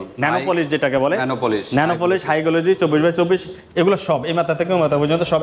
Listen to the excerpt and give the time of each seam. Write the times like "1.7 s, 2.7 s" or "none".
none